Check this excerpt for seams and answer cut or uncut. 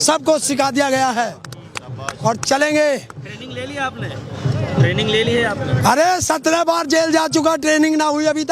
uncut